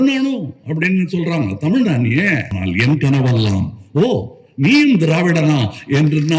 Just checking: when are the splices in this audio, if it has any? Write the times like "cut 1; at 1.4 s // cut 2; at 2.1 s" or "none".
cut 1; at 2.5 s